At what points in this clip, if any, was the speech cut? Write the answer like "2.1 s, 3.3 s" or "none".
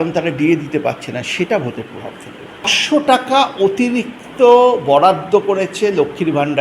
2.8 s